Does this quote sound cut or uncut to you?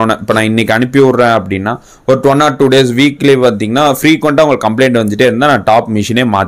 uncut